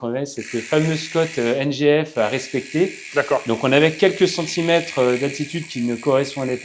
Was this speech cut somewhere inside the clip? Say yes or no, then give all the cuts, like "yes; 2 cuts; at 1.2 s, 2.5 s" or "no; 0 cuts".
no; 0 cuts